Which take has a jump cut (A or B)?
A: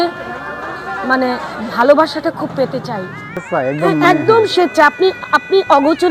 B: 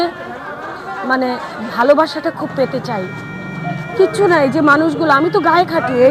A